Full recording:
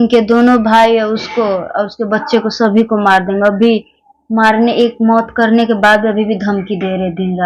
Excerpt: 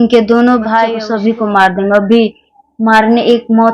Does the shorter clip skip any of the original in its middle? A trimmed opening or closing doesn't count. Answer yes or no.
yes